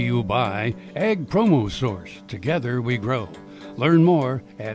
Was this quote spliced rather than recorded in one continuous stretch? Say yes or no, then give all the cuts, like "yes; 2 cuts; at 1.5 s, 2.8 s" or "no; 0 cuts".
no; 0 cuts